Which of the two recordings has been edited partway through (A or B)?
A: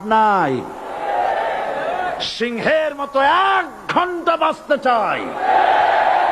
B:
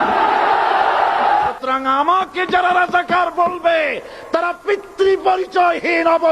B